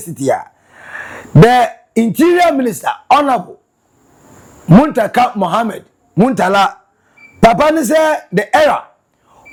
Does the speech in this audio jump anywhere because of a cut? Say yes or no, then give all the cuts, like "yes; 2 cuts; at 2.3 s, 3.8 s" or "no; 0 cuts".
no; 0 cuts